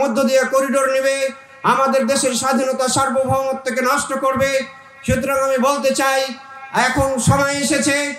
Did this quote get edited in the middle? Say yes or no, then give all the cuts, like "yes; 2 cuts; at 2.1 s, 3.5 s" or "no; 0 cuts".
no; 0 cuts